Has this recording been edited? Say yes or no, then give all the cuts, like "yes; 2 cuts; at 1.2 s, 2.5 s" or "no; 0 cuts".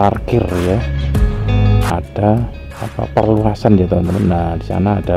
yes; 1 cut; at 1.9 s